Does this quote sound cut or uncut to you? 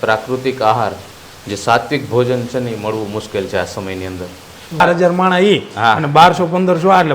cut